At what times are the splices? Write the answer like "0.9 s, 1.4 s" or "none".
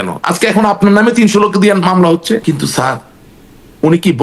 2.4 s